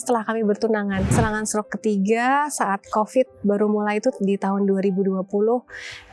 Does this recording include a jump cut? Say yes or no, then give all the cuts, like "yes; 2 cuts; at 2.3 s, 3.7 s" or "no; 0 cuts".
yes; 1 cut; at 1.1 s